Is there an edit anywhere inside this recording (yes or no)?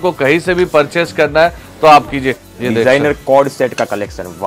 yes